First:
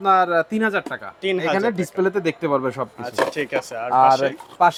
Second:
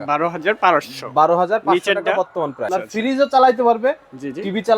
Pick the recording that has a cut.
second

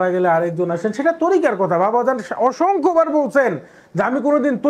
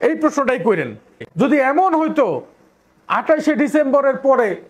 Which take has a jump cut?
second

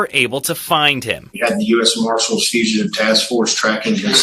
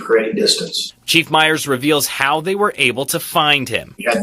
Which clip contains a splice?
second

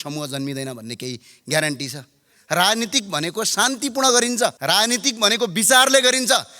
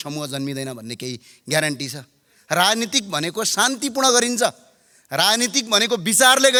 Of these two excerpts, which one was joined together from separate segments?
first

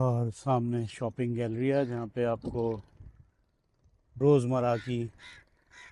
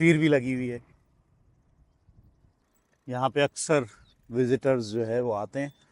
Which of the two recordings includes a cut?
second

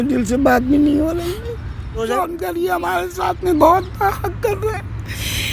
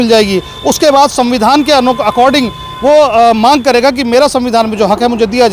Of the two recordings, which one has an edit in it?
first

